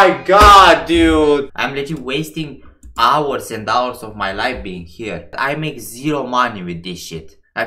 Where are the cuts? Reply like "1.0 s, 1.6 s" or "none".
1.6 s